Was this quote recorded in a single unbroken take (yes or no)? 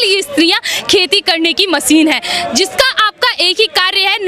yes